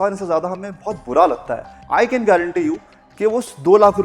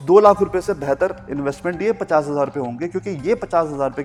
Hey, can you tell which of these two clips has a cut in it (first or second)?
first